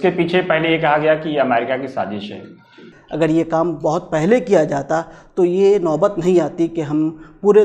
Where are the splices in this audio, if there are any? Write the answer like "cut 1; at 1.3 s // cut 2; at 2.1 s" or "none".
cut 1; at 2.9 s

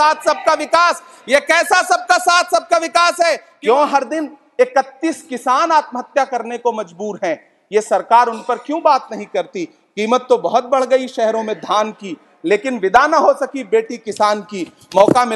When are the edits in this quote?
cut 1; at 3.5 s

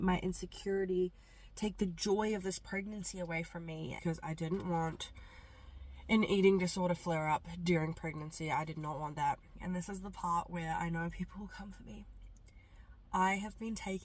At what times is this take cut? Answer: cut 1; at 4.0 s // cut 2; at 9.5 s

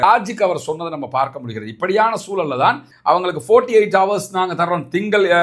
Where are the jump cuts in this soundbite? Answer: cut 1; at 2.9 s

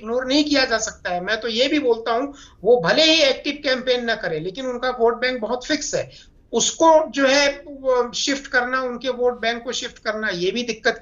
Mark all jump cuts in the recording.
none

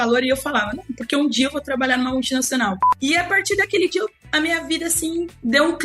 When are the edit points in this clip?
cut 1; at 2.9 s

